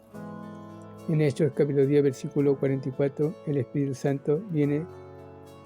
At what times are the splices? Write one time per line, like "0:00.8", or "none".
0:01.0

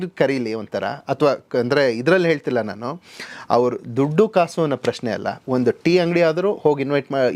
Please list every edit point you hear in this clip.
none

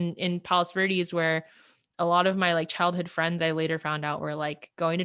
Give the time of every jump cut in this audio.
none

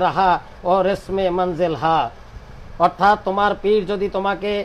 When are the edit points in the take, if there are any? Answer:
none

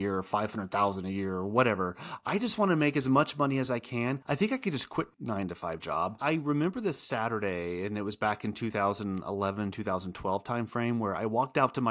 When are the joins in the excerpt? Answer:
0:04.2
0:06.2

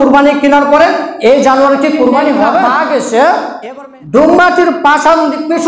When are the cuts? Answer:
0:02.7

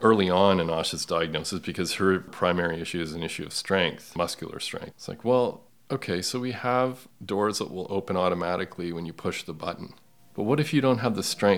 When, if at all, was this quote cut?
0:05.7

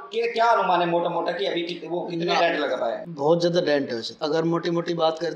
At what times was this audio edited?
0:03.1
0:04.0

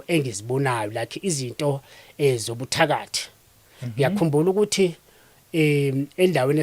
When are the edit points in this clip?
none

